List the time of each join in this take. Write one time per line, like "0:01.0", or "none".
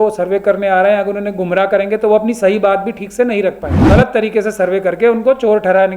0:03.7